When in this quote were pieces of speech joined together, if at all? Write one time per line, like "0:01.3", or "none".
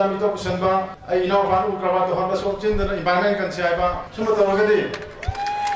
0:01.0
0:04.1